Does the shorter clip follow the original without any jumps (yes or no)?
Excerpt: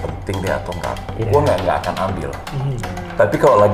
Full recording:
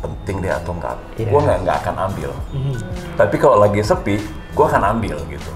yes